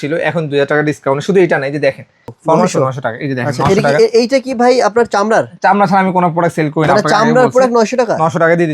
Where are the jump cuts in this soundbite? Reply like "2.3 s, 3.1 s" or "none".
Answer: 2.3 s